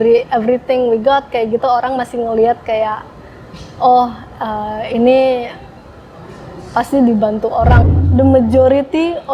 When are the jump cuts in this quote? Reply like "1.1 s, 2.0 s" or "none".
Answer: 7.9 s